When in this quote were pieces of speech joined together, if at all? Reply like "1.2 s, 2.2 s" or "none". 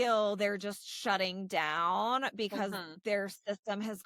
none